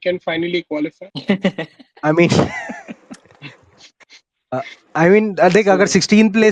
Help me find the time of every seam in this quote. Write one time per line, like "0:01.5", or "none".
0:01.1